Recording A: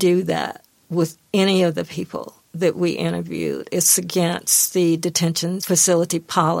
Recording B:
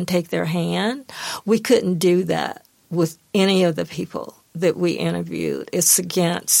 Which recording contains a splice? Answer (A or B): A